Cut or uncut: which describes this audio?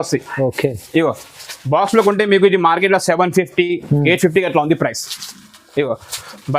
uncut